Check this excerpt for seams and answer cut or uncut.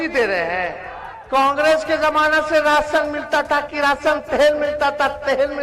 uncut